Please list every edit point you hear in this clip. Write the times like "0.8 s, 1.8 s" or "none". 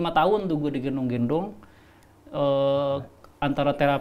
none